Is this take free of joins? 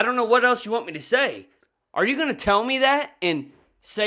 no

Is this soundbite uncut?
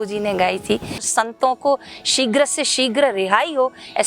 no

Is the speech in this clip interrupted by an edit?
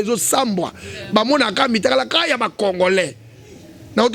no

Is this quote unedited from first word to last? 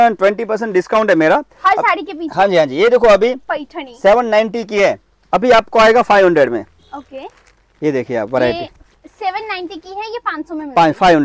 yes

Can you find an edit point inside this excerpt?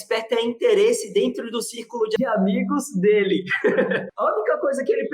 yes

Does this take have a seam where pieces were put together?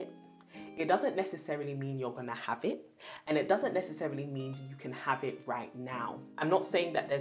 yes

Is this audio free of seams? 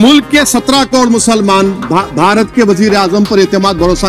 yes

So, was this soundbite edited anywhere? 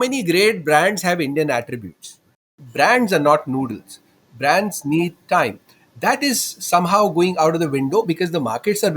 yes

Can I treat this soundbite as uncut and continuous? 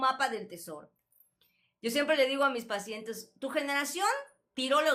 yes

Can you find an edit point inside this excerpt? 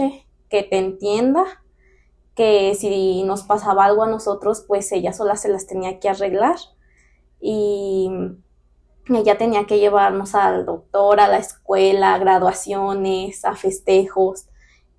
no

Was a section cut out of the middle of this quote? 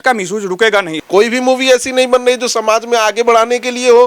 yes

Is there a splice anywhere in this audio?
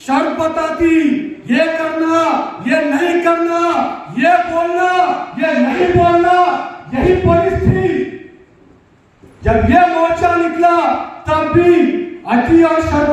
no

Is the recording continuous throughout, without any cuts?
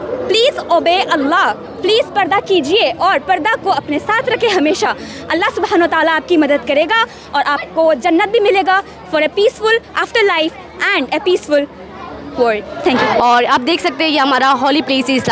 no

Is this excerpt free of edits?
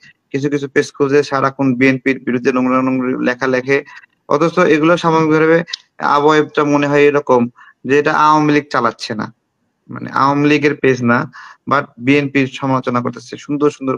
yes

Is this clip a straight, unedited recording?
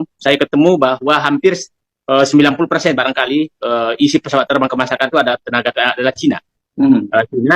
yes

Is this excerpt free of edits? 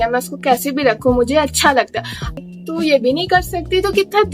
no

